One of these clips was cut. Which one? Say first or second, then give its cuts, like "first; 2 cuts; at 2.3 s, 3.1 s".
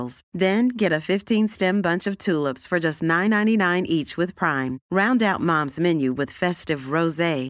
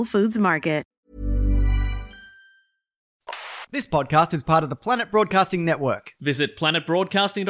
second; 2 cuts; at 1.0 s, 3.1 s